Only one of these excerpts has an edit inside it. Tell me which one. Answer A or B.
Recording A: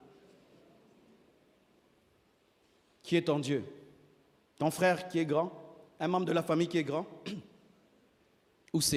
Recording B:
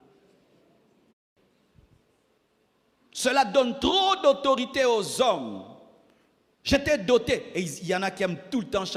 B